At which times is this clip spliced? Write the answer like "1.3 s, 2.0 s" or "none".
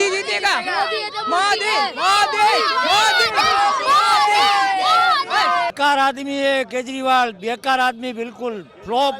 5.7 s